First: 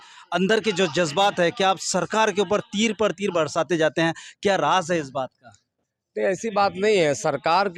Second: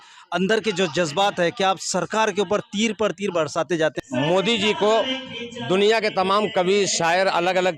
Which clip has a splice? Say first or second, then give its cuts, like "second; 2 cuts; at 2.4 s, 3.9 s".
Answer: second; 1 cut; at 4.0 s